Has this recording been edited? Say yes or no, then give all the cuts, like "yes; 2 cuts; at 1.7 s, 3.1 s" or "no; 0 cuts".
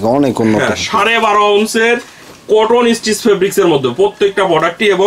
no; 0 cuts